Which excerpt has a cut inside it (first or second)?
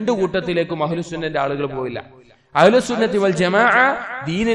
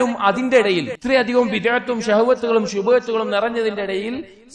second